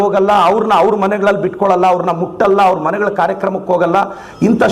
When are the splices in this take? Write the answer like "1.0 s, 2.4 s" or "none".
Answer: none